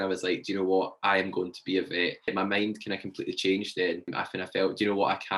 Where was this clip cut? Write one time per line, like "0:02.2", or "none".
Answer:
none